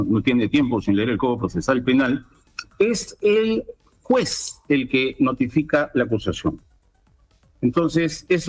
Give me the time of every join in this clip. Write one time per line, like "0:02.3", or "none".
none